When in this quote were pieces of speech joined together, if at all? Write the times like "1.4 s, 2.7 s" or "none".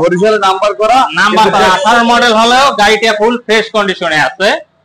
none